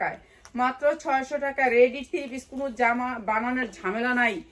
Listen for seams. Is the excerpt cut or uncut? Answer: uncut